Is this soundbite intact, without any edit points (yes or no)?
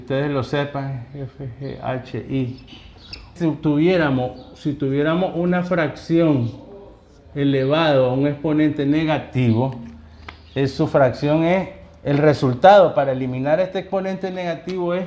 no